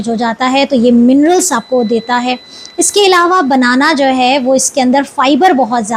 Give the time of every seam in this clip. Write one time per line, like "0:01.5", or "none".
none